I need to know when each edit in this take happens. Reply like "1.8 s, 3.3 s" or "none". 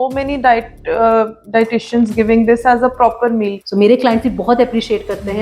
3.6 s